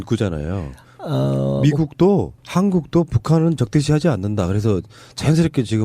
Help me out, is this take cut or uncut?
cut